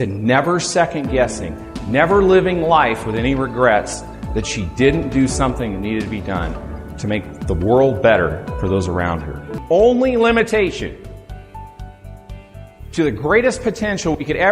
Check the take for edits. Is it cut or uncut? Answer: cut